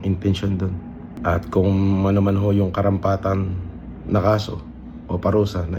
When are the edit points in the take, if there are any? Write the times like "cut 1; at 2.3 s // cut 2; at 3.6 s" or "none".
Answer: cut 1; at 1.1 s